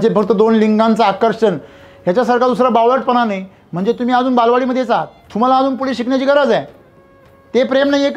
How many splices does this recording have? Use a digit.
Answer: 1